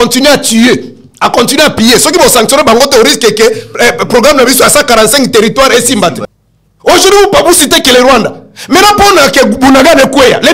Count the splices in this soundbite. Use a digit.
1